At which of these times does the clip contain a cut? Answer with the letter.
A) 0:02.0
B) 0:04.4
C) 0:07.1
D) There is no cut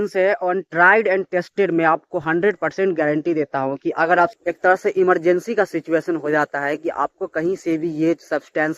B